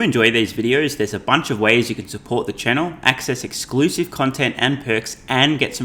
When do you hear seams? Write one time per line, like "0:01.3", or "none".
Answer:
none